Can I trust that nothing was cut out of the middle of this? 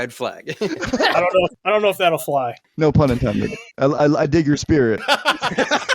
no; 4 cuts; at 1.6 s, 2.6 s, 3.7 s, 5.0 s

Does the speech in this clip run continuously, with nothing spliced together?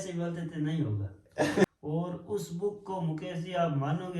no; 1 cut; at 1.7 s

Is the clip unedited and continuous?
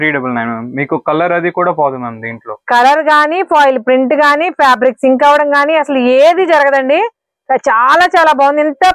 yes; 0 cuts

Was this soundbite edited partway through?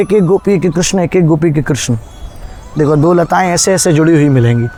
no; 0 cuts

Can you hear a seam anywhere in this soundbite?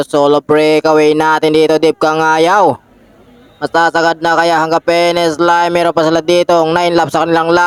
no; 0 cuts

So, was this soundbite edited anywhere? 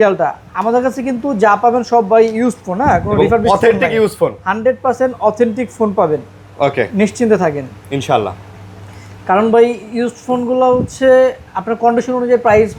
no; 0 cuts

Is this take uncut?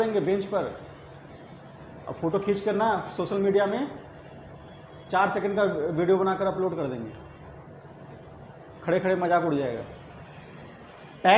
yes; 0 cuts

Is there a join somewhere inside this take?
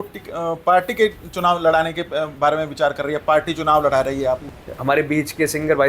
yes; 1 cut; at 4.5 s

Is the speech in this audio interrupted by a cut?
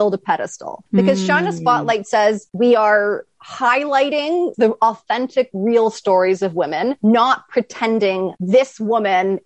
yes; 3 cuts; at 4.5 s, 7.0 s, 8.3 s

